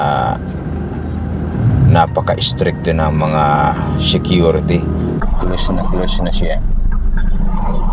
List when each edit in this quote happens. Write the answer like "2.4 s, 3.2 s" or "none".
5.2 s